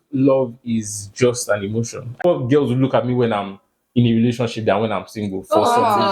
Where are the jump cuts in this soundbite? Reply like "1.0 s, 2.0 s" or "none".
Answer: 2.2 s